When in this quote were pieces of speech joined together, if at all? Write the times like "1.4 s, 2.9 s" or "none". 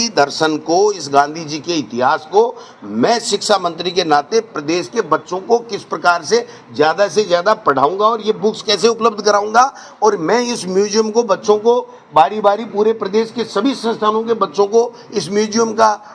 none